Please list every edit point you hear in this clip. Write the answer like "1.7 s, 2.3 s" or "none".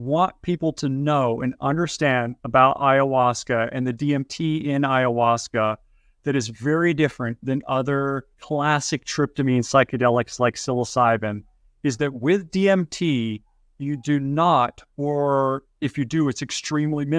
8.3 s